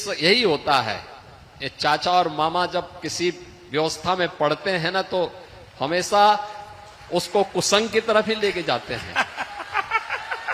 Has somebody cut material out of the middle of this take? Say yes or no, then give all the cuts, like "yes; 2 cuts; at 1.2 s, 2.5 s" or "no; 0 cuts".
no; 0 cuts